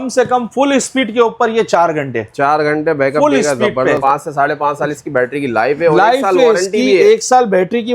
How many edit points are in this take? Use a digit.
1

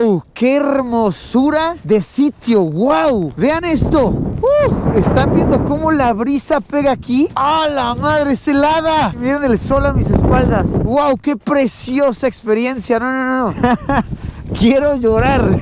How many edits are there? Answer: 2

